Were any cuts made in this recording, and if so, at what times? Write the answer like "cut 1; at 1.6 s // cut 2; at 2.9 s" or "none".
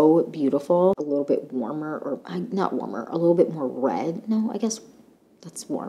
cut 1; at 1.0 s